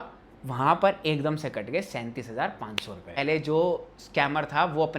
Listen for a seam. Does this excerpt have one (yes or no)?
yes